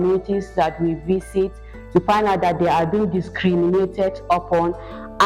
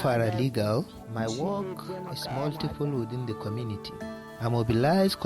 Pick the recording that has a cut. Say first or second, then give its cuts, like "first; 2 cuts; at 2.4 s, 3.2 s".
second; 2 cuts; at 0.9 s, 4.3 s